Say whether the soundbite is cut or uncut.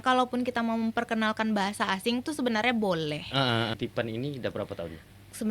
cut